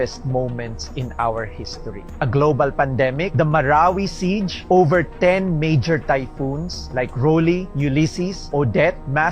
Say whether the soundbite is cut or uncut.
cut